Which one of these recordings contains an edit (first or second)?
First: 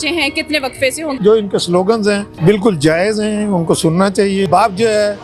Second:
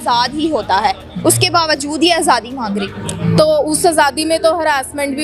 first